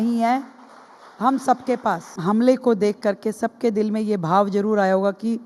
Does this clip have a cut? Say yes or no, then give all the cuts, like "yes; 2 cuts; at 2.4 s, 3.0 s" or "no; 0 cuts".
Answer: yes; 1 cut; at 2.1 s